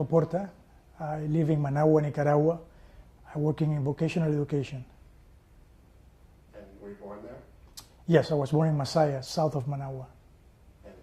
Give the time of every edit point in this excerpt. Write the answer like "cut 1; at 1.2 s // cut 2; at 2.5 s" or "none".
cut 1; at 7.0 s